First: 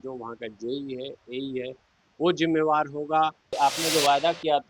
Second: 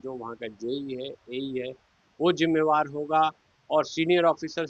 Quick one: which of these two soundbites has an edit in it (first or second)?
first